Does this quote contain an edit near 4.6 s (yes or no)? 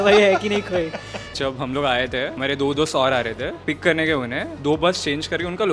yes